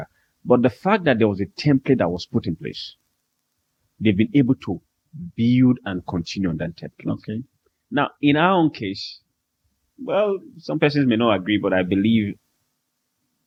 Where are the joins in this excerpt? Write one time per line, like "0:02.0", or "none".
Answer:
none